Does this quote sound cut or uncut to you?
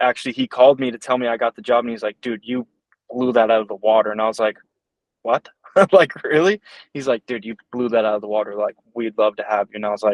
uncut